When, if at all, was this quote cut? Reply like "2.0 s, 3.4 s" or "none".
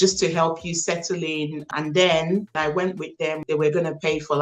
1.7 s, 3.0 s